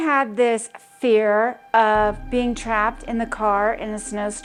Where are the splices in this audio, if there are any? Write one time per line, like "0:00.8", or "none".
none